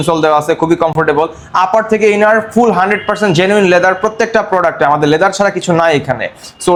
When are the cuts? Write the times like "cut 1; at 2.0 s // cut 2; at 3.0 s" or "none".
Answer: none